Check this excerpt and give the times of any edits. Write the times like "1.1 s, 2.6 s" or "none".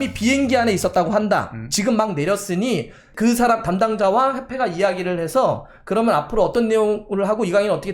3.0 s

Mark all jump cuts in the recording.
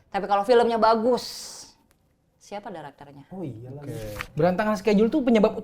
4.2 s

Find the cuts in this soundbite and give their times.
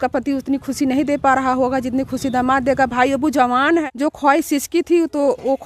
3.8 s

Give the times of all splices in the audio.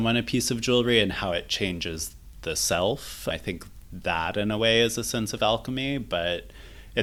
none

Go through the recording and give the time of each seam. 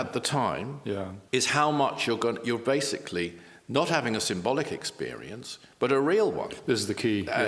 1.2 s

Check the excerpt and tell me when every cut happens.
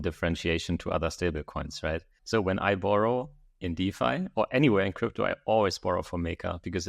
2.2 s

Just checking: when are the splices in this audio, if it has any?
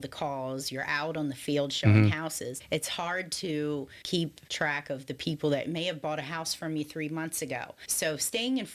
2.6 s, 4.2 s, 7.8 s

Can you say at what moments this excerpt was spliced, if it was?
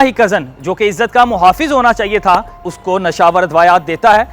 2.5 s

